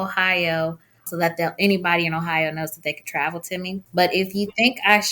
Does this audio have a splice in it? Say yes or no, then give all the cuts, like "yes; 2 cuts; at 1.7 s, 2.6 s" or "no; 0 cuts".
yes; 2 cuts; at 1.1 s, 3.9 s